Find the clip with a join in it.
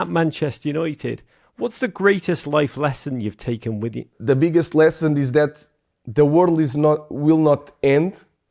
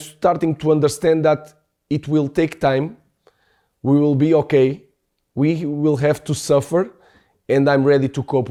first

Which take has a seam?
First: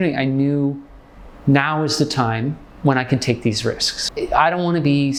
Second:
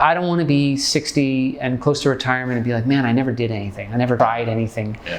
second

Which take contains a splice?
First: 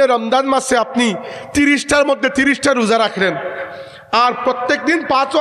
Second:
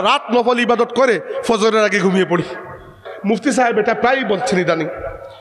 second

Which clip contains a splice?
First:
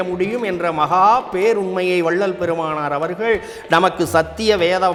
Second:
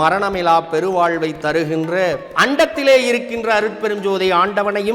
second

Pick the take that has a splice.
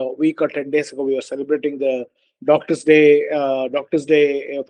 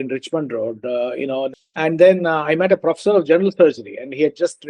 second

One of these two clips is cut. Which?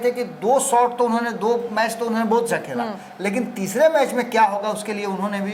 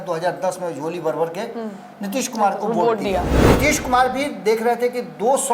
second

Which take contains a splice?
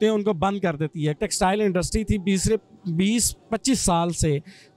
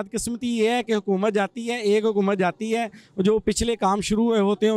first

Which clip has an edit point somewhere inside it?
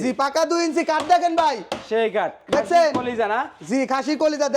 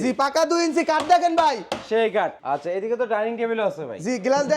second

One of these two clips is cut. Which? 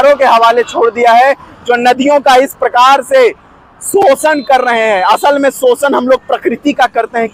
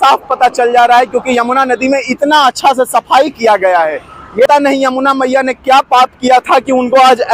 second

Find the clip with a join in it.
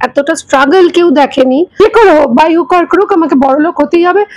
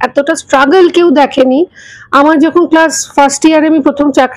first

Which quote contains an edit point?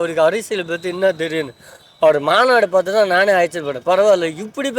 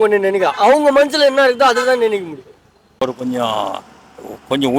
second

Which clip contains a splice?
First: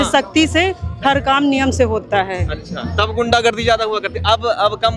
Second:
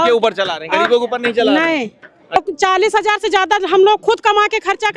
second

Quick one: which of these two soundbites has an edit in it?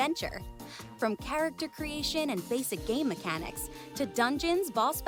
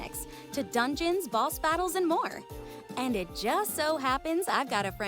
second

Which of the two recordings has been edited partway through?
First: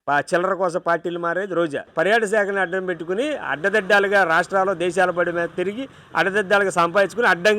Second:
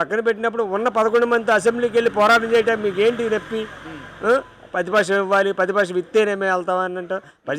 first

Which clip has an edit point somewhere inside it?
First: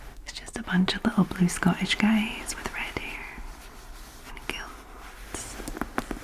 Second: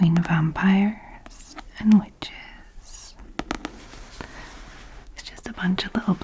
second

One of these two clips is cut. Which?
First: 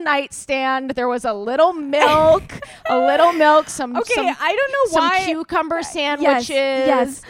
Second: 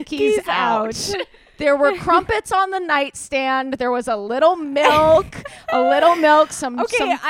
second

